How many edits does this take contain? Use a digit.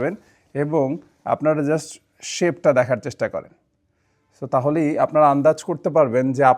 0